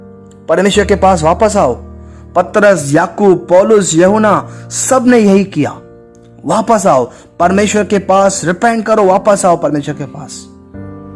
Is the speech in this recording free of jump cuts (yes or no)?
no